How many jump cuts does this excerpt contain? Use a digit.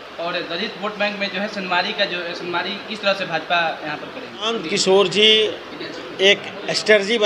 1